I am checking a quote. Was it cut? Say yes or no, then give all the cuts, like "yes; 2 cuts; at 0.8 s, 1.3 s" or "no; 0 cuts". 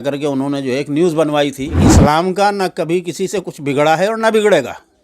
yes; 1 cut; at 1.9 s